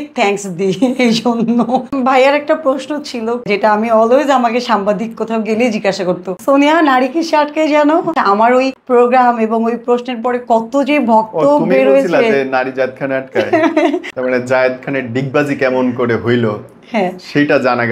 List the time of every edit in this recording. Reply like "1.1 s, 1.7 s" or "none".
1.9 s, 3.5 s, 6.3 s, 8.4 s, 14.1 s